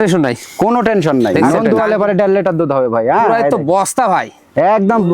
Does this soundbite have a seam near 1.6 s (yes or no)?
yes